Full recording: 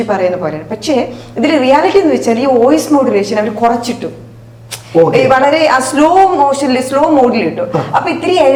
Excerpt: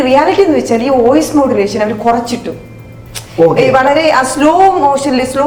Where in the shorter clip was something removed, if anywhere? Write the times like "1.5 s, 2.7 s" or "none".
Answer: none